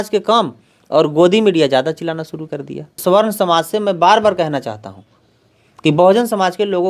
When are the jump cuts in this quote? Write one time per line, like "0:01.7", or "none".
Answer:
0:02.9

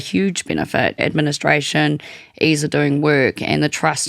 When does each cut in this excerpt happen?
0:01.0

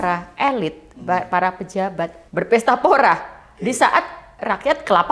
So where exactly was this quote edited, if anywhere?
0:02.2

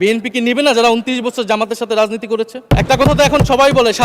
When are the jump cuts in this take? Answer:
0:02.6

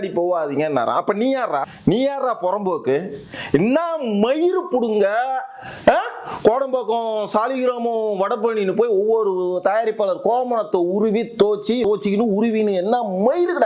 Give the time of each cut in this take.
0:01.7
0:11.9

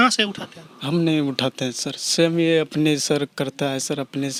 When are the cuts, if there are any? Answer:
none

